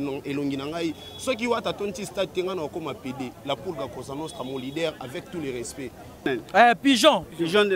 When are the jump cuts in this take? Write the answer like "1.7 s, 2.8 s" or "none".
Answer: 6.3 s